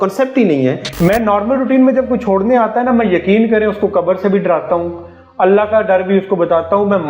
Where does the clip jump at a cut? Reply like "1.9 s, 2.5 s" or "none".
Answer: 0.9 s